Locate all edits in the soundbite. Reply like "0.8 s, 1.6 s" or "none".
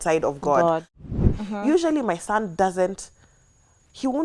1.0 s